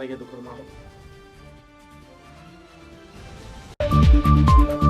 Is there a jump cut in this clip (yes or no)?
yes